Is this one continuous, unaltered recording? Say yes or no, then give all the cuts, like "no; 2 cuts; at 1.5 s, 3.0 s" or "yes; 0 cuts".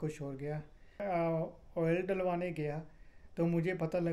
no; 1 cut; at 1.0 s